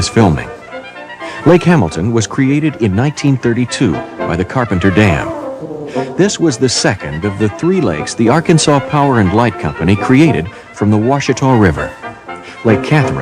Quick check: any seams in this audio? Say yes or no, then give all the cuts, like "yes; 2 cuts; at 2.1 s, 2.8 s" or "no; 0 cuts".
no; 0 cuts